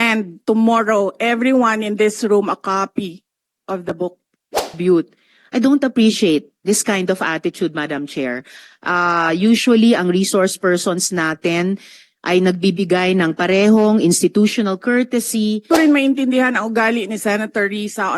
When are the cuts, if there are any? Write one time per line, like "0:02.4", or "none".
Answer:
0:04.8
0:15.7

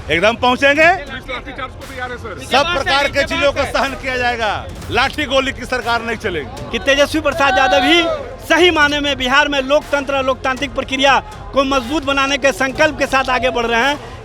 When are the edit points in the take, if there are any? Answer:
0:06.6

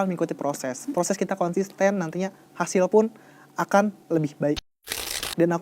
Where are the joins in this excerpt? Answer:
0:04.6

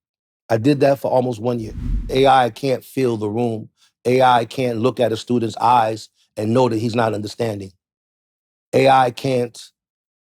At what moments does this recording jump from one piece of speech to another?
0:02.1

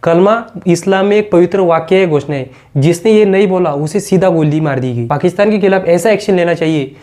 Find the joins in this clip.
0:05.1

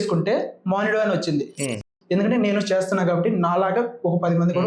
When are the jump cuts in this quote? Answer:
0:01.9

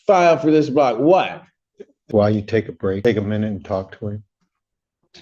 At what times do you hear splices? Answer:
0:02.0
0:03.0

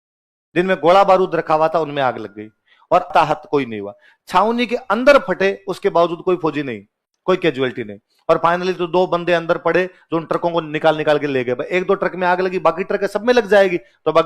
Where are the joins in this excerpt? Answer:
0:03.1

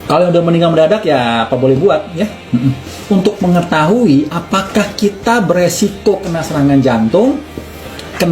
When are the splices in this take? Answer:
0:03.0
0:04.0

